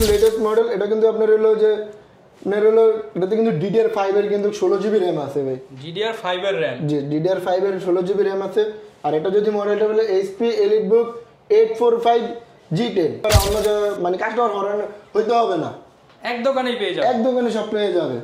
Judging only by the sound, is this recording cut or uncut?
cut